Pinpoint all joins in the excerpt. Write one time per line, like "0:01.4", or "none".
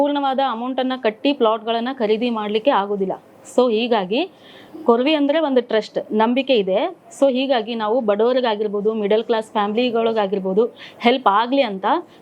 none